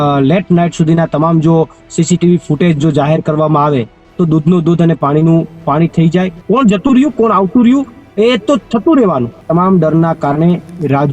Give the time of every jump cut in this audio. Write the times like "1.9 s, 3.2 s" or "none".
6.4 s, 9.3 s